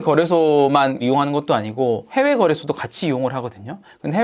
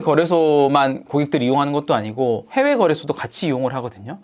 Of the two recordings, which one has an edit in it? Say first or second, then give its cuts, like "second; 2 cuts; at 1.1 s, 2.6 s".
first; 1 cut; at 1.0 s